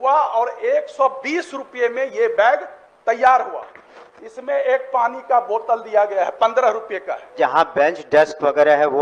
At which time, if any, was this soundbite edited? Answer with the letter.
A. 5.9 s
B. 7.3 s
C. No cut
B